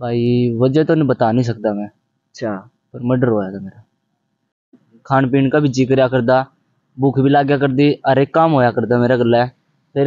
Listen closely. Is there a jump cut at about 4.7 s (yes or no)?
yes